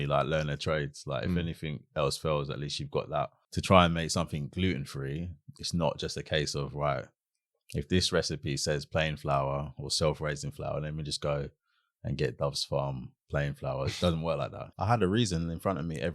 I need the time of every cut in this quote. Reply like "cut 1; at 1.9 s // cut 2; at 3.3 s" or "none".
cut 1; at 3.5 s // cut 2; at 14.6 s